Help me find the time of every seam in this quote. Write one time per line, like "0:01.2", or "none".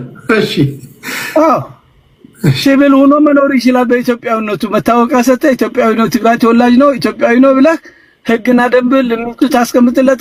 none